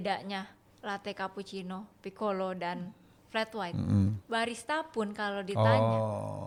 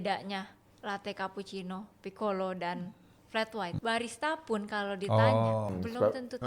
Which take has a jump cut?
second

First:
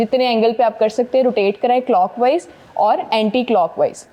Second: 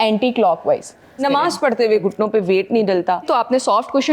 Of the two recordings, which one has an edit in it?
second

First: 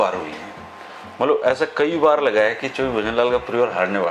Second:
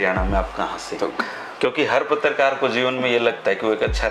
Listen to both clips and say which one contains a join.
second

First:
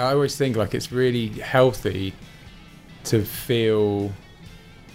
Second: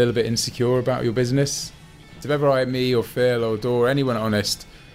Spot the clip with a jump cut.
second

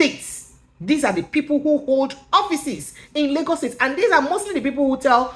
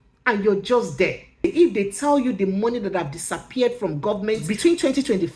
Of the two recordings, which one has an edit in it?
second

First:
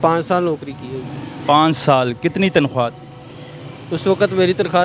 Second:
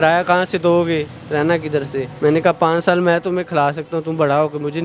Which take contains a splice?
second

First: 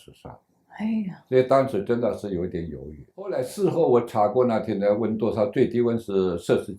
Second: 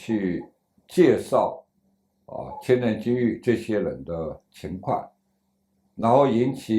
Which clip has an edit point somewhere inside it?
first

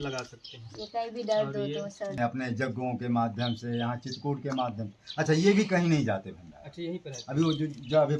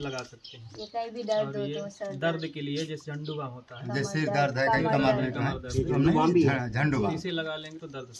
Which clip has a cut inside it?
first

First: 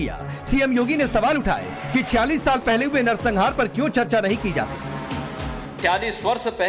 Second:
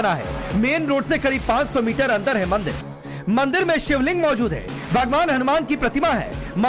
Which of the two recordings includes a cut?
first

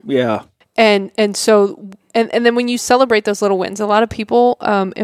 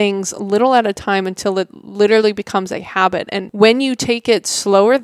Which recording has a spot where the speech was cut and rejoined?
second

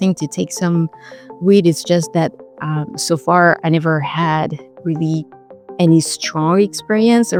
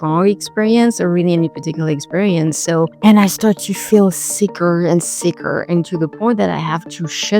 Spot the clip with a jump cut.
second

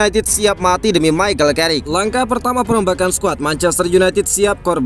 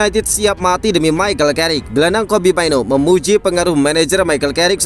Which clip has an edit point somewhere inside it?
first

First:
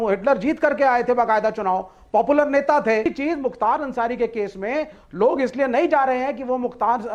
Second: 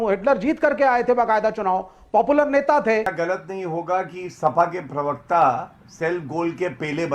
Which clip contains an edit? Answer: second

